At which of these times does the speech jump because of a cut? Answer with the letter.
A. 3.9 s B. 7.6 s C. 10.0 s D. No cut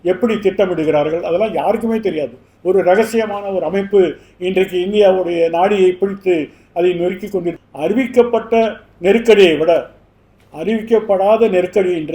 B